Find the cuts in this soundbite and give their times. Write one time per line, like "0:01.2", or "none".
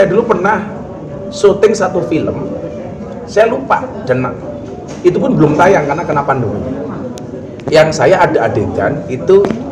none